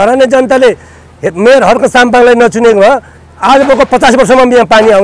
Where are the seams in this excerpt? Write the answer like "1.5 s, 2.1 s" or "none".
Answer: none